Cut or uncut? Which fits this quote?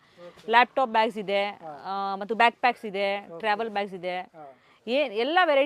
uncut